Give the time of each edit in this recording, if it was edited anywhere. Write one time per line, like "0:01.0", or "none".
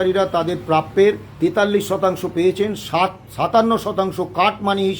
0:01.3